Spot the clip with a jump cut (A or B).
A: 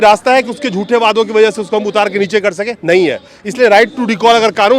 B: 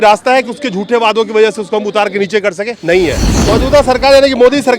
B